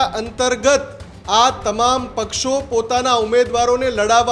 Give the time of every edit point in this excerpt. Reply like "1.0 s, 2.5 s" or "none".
none